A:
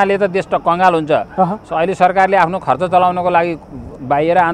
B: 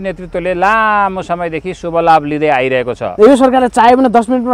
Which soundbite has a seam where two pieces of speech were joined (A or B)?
B